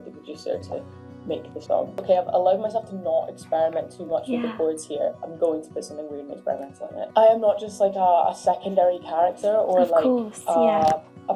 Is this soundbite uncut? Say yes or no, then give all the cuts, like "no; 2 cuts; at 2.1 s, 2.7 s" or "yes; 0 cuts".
no; 2 cuts; at 2.0 s, 7.1 s